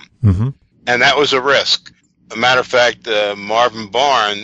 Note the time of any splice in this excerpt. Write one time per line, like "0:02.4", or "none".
none